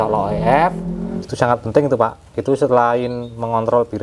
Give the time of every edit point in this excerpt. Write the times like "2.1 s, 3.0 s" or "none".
1.2 s